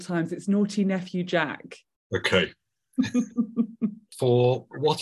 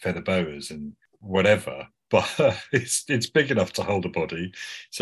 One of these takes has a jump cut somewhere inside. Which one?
first; 1 cut; at 4.1 s

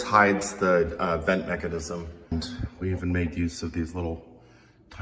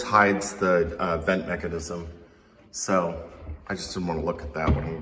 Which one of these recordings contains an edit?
first; 1 cut; at 2.3 s

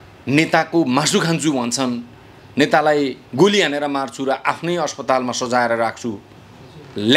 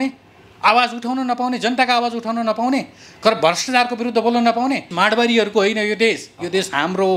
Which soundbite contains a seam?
second; 1 cut; at 4.9 s

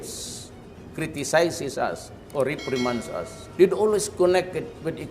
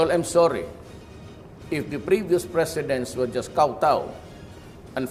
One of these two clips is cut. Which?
first; 1 cut; at 3.4 s

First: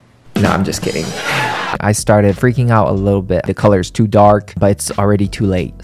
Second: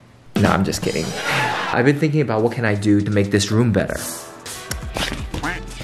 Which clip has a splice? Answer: first; 2 cuts; at 1.7 s, 3.5 s

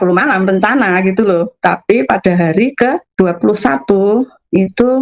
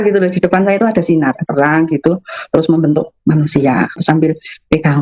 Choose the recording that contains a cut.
second; 2 cuts; at 1.4 s, 4.0 s

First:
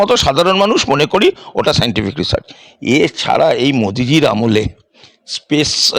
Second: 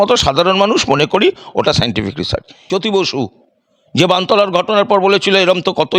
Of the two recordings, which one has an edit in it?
second; 1 cut; at 2.5 s

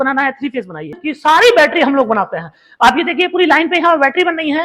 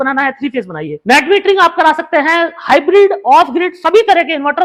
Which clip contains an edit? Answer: first; 1 cut; at 1.0 s

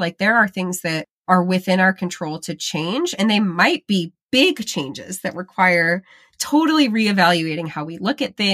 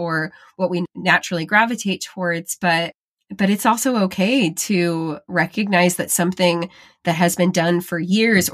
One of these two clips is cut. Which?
first; 1 cut; at 4.2 s

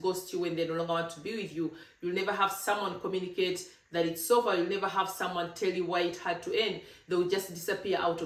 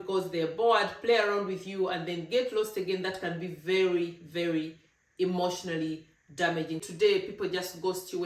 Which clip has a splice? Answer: second; 1 cut; at 6.8 s

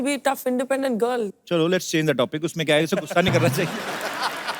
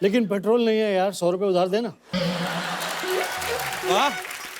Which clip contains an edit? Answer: first; 1 cut; at 1.3 s

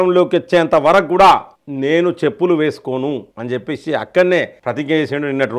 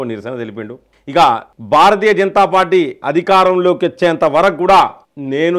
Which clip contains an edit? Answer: second; 1 cut; at 1.5 s

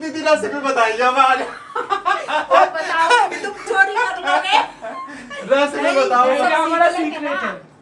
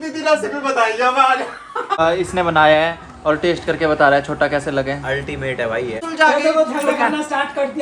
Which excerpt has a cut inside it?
second; 2 cuts; at 2.0 s, 6.0 s

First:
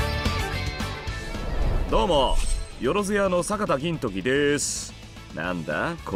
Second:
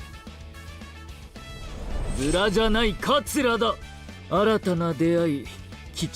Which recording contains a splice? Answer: second; 1 cut; at 1.1 s

